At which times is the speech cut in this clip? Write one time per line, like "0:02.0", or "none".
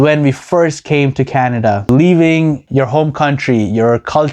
0:01.8
0:02.6